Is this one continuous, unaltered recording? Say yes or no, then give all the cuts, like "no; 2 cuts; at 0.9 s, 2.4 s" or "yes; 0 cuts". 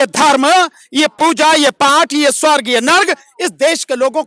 yes; 0 cuts